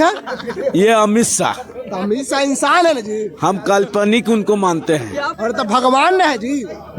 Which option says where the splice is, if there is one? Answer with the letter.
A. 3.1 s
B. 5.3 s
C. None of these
B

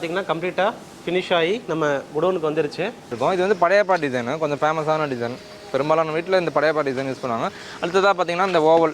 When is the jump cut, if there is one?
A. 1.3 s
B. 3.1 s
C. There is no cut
B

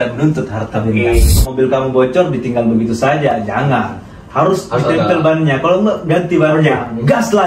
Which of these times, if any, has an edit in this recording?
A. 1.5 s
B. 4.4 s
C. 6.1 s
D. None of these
A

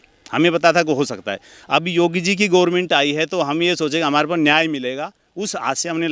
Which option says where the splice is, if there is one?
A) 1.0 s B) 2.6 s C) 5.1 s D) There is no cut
D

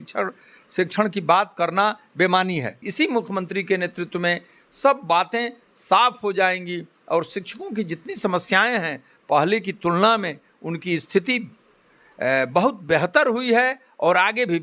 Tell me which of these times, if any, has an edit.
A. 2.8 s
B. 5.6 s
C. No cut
A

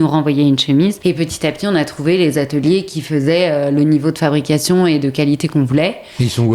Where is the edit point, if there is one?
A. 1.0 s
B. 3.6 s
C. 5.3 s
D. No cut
A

